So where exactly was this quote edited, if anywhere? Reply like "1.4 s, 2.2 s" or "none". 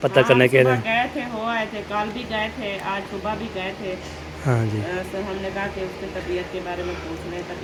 none